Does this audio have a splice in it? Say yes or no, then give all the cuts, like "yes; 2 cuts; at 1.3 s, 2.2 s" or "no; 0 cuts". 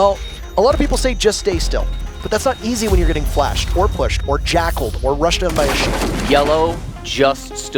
no; 0 cuts